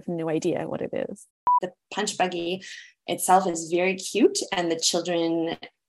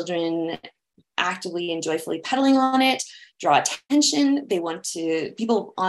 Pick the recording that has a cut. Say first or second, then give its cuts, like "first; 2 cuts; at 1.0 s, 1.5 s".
first; 1 cut; at 1.6 s